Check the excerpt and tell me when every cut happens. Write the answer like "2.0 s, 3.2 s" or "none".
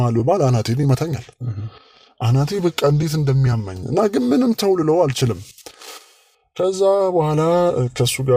none